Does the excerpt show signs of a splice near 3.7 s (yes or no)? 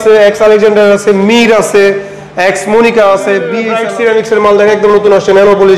yes